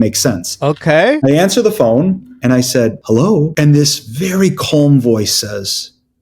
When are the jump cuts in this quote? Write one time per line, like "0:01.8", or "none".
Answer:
0:01.2
0:03.1

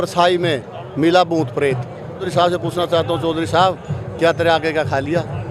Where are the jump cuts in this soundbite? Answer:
0:02.3

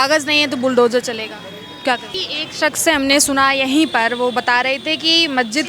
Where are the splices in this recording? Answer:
0:02.2

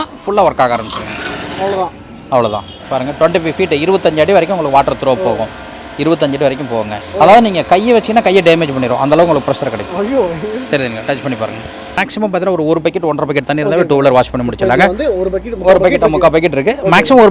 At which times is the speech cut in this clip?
0:07.0
0:12.0

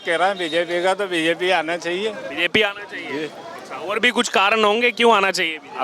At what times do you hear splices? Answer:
none

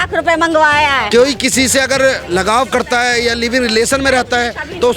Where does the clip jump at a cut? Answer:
0:01.0

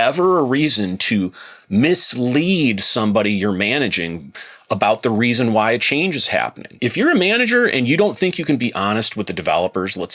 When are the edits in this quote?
none

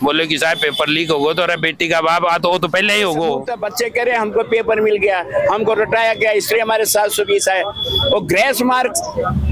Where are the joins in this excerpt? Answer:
0:03.5

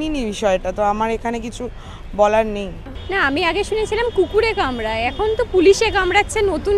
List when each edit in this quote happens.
0:02.8

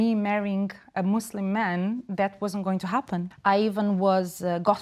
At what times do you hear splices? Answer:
0:03.3

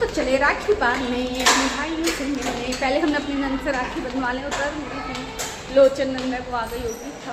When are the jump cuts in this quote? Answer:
none

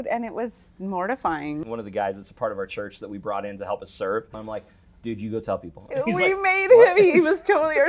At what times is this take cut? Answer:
0:01.7
0:04.4

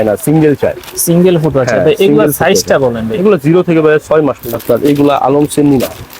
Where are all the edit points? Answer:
0:04.4

